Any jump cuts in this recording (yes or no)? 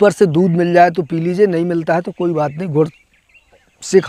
no